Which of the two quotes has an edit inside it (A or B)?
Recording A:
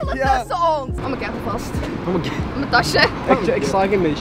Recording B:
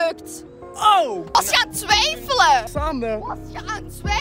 B